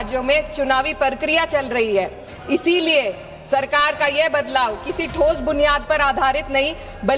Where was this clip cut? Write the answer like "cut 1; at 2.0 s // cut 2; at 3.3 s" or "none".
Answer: none

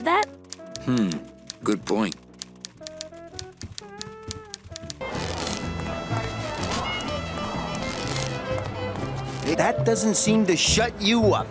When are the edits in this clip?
none

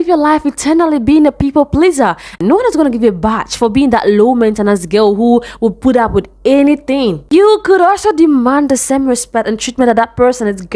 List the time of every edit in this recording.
cut 1; at 2.4 s // cut 2; at 7.3 s

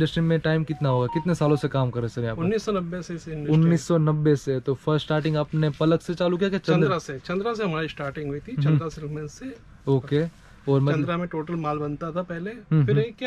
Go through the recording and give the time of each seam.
none

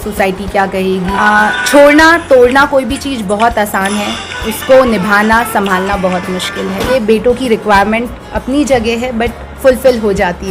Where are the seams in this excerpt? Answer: cut 1; at 1.1 s // cut 2; at 6.8 s

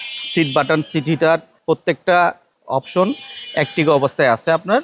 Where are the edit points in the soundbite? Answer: cut 1; at 1.5 s // cut 2; at 2.5 s

